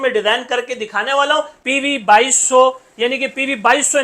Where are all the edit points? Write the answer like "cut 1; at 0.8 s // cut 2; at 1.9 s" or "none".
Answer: cut 1; at 1.6 s

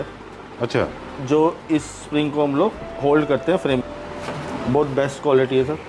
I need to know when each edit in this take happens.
cut 1; at 3.8 s

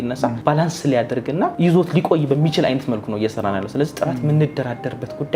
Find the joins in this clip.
none

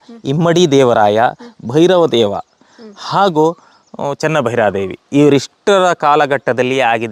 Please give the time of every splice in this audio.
none

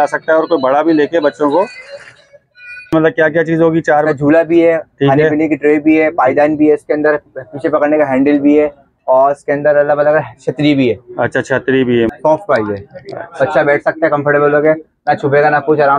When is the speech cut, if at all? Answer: cut 1; at 2.9 s // cut 2; at 12.1 s

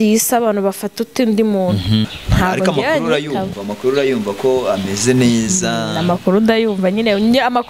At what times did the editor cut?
cut 1; at 2.2 s

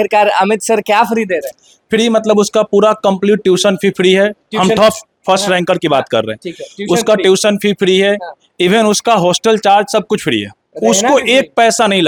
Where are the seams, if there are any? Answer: none

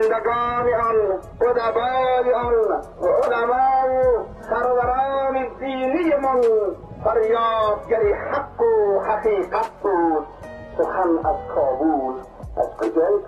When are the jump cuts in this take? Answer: cut 1; at 1.3 s // cut 2; at 2.9 s // cut 3; at 4.4 s // cut 4; at 6.9 s

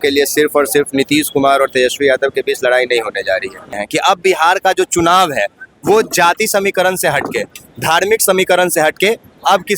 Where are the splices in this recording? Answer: cut 1; at 3.8 s

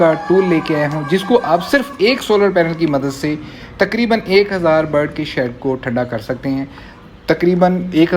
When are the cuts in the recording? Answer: none

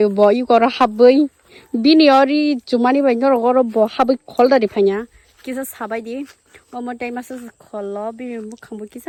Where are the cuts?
none

